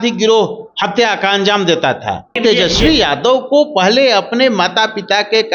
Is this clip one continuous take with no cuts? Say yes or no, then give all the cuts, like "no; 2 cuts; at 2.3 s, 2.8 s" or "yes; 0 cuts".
no; 1 cut; at 2.4 s